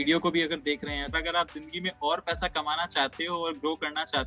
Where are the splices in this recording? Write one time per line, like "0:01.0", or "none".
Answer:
0:01.1